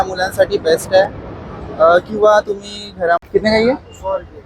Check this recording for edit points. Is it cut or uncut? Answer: cut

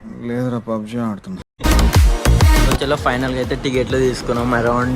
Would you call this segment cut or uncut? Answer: cut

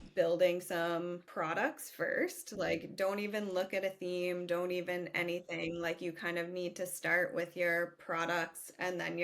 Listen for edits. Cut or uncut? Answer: cut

